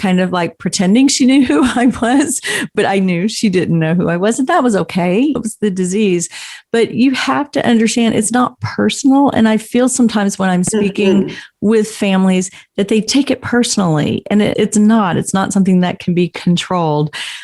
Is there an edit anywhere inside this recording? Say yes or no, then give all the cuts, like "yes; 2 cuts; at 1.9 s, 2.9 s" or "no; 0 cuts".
yes; 3 cuts; at 2.7 s, 5.4 s, 14.5 s